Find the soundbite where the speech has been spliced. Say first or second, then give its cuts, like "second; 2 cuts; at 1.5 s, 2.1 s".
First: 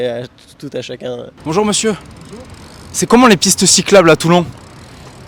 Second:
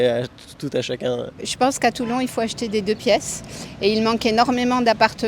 second; 1 cut; at 1.3 s